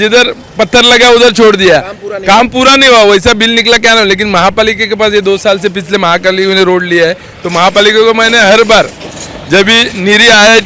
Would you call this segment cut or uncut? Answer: uncut